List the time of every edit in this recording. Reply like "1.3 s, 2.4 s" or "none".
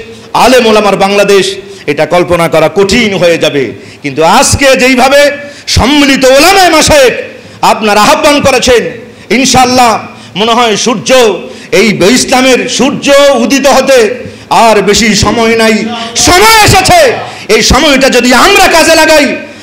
none